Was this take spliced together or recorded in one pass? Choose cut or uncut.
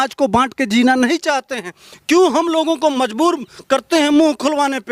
uncut